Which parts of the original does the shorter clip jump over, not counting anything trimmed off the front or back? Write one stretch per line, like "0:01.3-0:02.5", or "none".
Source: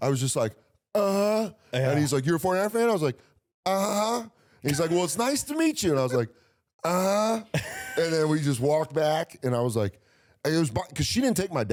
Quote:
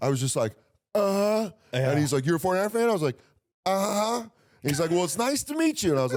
none